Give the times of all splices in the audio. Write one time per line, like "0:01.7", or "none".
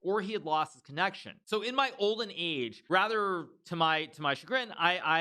0:01.3
0:02.8